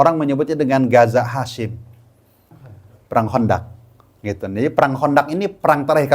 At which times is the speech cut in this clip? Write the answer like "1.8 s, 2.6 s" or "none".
2.6 s